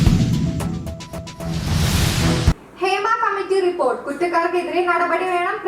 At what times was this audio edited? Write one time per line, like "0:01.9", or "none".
0:01.4